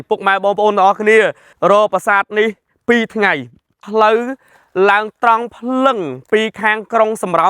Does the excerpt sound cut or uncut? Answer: cut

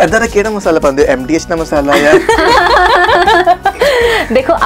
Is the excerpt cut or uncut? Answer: uncut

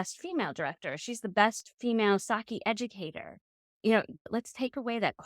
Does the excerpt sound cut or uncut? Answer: cut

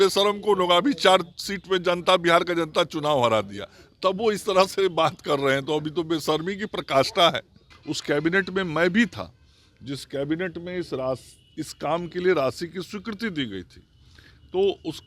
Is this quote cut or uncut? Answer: cut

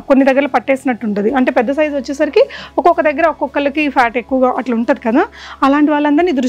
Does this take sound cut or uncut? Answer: uncut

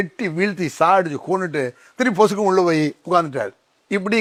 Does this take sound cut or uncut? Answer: uncut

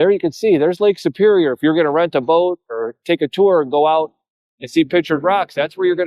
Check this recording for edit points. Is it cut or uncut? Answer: uncut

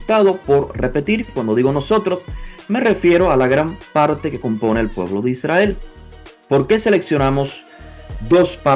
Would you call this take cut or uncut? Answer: uncut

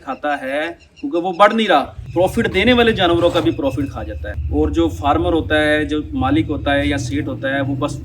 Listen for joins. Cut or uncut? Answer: uncut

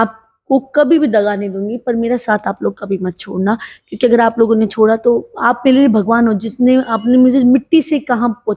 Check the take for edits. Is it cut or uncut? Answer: uncut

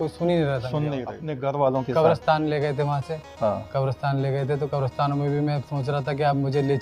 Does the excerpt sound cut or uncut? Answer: cut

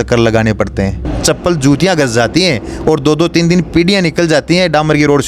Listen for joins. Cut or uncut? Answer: cut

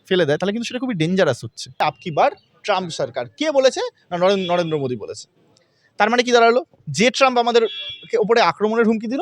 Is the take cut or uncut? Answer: cut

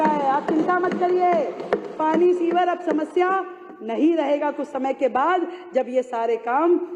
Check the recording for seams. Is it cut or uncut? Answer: uncut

